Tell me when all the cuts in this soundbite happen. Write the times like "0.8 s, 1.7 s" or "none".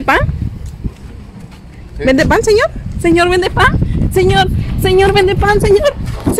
none